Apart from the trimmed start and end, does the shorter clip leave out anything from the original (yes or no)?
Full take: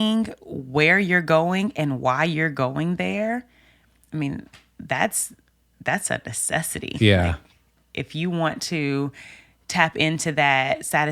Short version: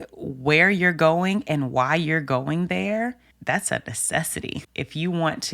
yes